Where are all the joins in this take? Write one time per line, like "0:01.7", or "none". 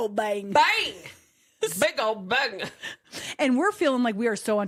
none